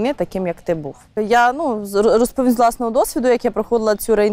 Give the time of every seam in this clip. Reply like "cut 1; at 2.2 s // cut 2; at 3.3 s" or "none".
none